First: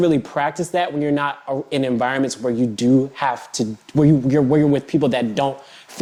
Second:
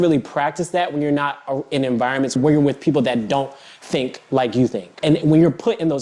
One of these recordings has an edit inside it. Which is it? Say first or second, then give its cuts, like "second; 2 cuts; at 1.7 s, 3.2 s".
second; 2 cuts; at 2.4 s, 4.9 s